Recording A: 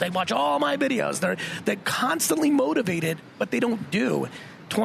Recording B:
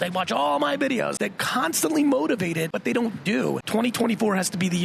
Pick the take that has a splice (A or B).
B